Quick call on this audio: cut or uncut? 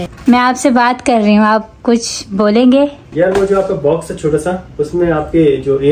cut